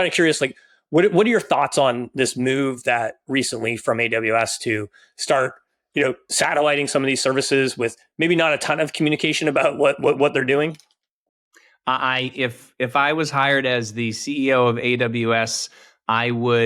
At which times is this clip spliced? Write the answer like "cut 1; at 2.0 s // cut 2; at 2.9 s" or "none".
none